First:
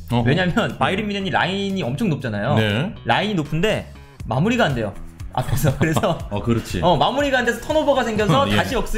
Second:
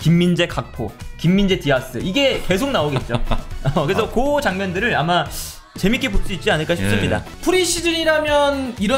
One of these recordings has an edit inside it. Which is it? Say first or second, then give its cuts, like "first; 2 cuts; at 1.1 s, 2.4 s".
second; 1 cut; at 7.3 s